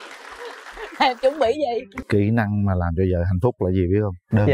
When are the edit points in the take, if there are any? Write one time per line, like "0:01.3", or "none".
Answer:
0:02.0